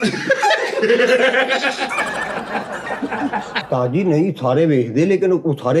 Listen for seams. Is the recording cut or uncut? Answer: cut